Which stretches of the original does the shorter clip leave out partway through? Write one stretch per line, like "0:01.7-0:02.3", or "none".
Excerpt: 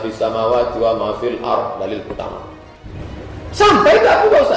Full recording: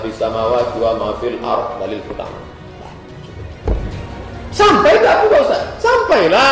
0:02.9-0:03.9